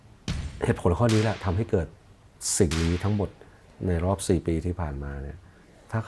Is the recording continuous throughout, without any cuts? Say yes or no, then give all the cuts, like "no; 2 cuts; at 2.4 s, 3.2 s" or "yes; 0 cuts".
yes; 0 cuts